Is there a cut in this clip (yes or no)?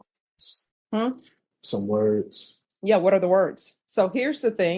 yes